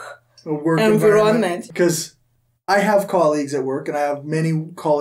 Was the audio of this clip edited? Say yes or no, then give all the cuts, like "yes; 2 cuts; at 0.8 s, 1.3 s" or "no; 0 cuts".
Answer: yes; 1 cut; at 1.6 s